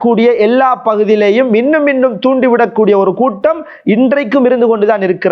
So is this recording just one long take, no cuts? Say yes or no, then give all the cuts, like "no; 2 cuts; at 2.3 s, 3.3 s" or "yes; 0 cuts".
yes; 0 cuts